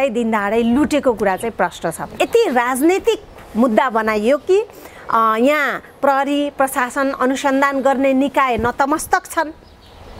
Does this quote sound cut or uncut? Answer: cut